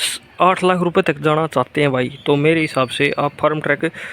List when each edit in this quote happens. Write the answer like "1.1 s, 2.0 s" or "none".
none